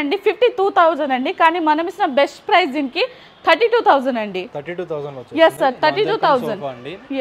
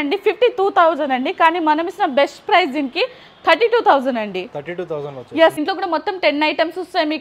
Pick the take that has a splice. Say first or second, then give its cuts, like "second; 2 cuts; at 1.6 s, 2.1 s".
second; 1 cut; at 5.6 s